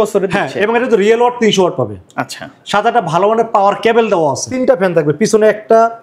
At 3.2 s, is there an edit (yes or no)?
no